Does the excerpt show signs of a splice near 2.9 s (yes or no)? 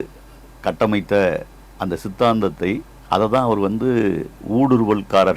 yes